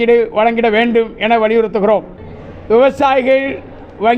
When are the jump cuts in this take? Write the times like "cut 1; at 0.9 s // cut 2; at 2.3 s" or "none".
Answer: none